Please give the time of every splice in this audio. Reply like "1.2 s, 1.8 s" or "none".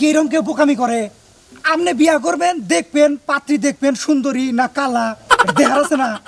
none

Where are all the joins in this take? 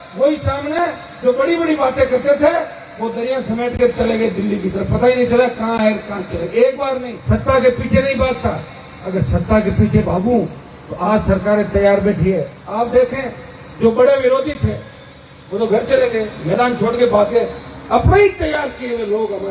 7.1 s, 12.6 s

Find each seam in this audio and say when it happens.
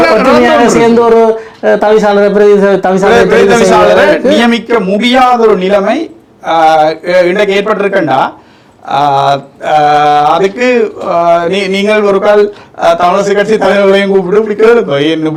none

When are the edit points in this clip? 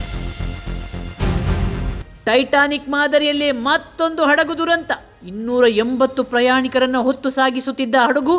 2.1 s

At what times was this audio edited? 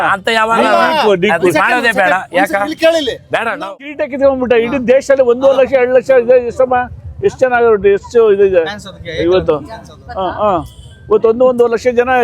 3.7 s

